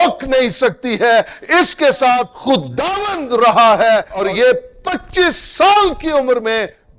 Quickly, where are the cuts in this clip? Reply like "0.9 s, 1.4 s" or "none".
2.3 s, 4.2 s